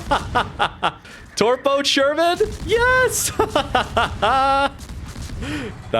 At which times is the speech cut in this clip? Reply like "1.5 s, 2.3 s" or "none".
1.0 s